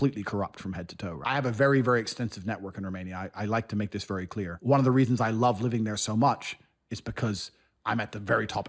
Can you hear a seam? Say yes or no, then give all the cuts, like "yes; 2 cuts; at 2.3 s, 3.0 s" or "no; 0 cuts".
yes; 2 cuts; at 1.2 s, 4.5 s